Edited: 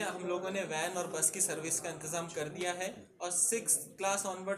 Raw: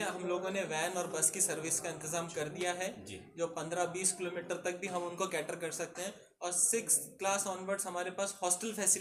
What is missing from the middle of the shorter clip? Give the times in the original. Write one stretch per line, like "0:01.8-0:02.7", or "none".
0:03.1-0:06.3